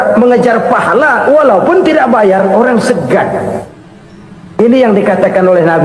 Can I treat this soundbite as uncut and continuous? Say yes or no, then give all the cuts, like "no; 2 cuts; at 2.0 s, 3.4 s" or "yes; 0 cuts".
yes; 0 cuts